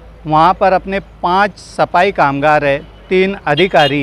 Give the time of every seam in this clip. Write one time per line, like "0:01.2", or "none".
none